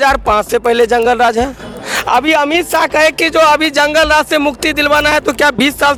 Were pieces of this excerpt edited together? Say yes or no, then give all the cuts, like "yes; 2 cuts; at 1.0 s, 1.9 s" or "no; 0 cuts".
no; 0 cuts